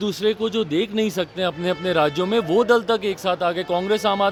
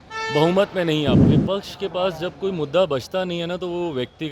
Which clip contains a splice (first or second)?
second